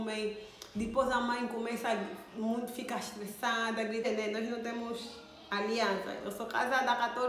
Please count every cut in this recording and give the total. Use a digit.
1